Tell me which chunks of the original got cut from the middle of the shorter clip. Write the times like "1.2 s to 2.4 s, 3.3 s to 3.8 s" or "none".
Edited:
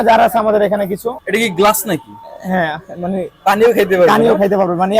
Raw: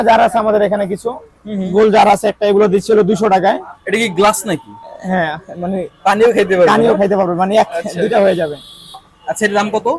1.2 s to 3.8 s